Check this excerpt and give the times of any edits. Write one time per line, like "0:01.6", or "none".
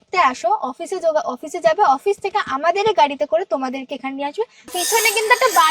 0:04.7

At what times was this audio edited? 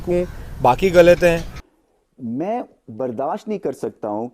0:01.5

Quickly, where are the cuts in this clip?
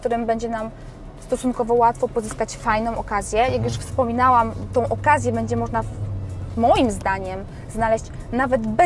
none

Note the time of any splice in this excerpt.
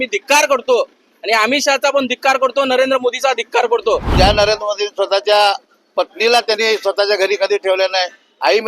0:04.1

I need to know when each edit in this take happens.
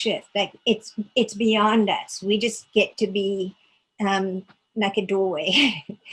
none

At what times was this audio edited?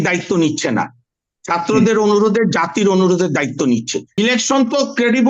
0:04.2

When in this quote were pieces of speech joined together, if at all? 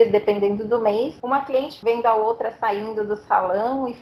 0:01.6

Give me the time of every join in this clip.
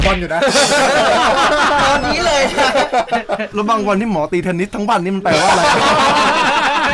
0:03.5

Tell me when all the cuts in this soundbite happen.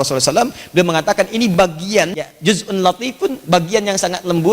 0:02.3

